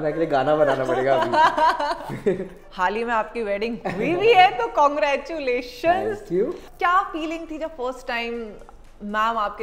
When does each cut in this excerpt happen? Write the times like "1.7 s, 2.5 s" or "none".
2.6 s, 6.6 s